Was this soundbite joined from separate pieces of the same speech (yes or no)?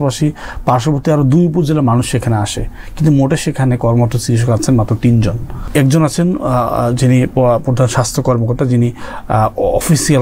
yes